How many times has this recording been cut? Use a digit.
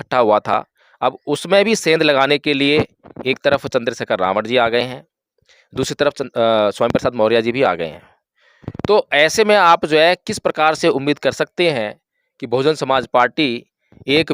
0